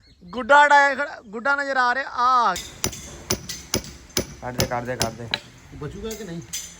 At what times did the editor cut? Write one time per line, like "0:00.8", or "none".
0:02.6